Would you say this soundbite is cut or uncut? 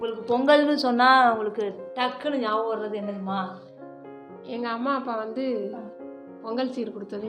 uncut